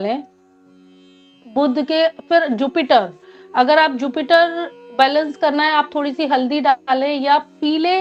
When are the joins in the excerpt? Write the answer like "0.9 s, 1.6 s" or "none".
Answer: none